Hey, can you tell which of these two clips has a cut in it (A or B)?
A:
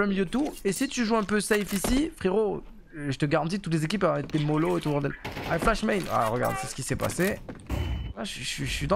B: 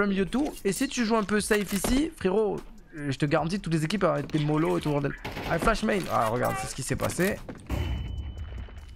A